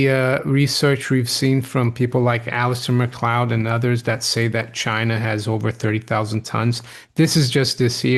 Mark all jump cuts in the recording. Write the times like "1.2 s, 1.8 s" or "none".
none